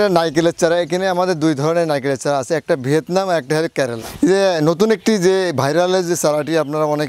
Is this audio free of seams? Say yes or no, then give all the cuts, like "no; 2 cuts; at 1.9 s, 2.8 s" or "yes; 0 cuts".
no; 1 cut; at 4.4 s